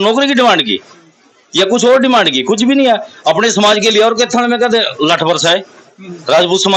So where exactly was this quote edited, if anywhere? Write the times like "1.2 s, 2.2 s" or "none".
none